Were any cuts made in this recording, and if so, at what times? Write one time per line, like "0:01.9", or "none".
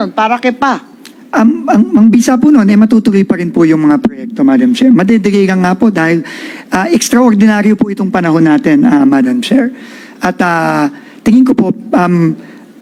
none